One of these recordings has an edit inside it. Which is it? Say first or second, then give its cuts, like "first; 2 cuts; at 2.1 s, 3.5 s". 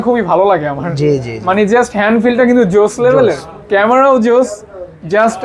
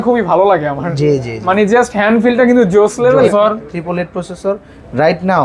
second; 1 cut; at 3.3 s